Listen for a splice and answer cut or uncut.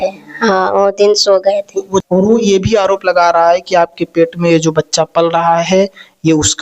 cut